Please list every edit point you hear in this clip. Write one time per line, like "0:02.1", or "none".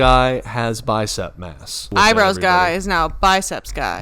0:01.9